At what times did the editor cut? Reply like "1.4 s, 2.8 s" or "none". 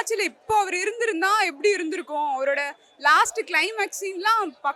none